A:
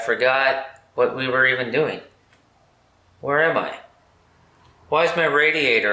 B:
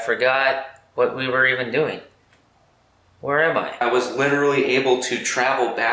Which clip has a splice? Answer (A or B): B